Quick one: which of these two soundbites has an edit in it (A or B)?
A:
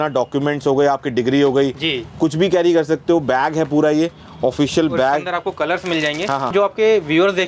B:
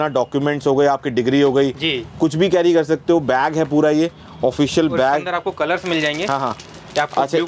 A